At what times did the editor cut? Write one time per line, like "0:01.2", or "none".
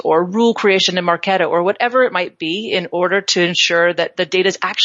none